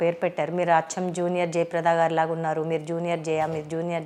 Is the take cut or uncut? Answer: uncut